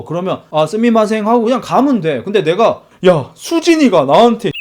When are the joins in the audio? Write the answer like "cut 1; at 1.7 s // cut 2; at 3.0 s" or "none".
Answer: cut 1; at 2.9 s

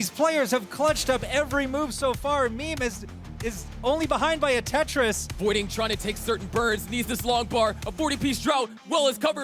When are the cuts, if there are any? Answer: cut 1; at 5.3 s

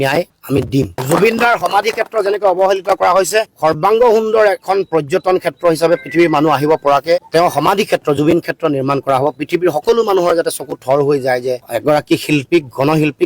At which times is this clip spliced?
cut 1; at 1.0 s

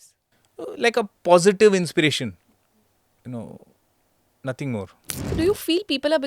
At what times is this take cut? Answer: cut 1; at 5.3 s

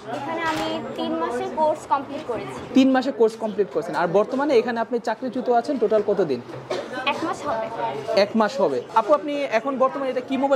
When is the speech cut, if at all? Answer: cut 1; at 8.9 s

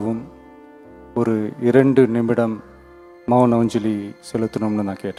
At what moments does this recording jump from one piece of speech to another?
none

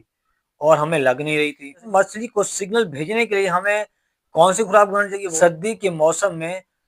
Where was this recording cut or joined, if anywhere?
cut 1; at 1.9 s // cut 2; at 5.2 s

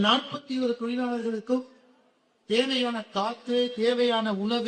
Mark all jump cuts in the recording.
cut 1; at 1.0 s

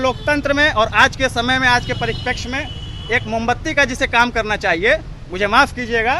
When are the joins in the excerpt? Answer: none

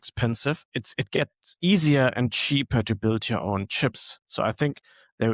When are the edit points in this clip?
cut 1; at 1.1 s

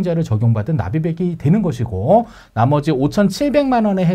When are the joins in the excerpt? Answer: none

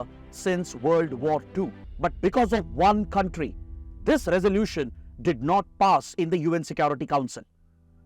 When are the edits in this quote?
cut 1; at 1.8 s

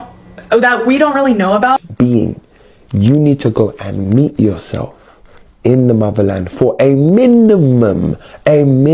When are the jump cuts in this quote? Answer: cut 1; at 1.8 s

